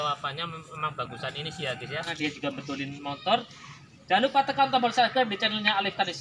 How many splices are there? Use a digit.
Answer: 1